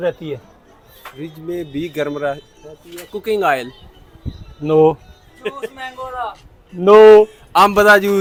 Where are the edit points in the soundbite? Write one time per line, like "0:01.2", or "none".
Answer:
none